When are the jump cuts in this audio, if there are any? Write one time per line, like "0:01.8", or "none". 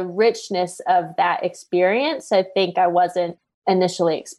0:03.4